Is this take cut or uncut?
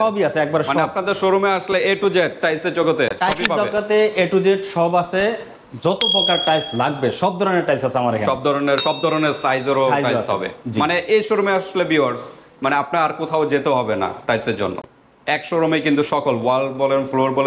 uncut